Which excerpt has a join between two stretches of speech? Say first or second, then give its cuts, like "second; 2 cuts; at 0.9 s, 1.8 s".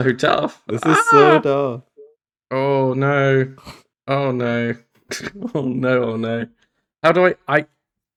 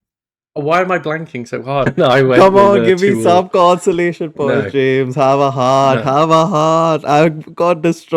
second; 1 cut; at 1.9 s